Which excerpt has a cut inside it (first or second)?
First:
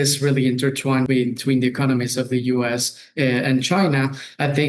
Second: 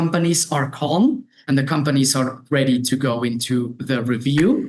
first